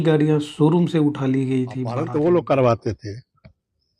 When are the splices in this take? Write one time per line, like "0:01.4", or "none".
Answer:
0:02.0